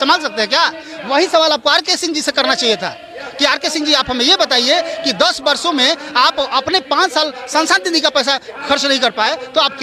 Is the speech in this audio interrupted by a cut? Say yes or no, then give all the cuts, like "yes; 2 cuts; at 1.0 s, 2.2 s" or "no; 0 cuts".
no; 0 cuts